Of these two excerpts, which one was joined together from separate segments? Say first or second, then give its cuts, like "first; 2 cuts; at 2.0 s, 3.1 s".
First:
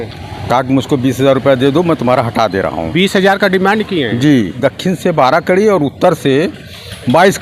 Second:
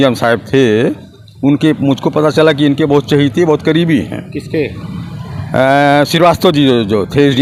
first; 1 cut; at 4.5 s